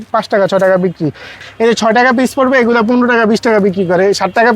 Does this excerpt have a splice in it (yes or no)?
yes